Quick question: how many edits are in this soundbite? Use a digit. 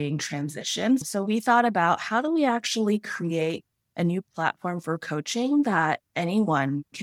1